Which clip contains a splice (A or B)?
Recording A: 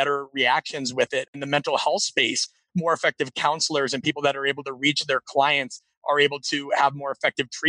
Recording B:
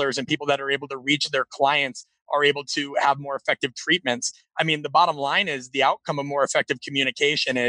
A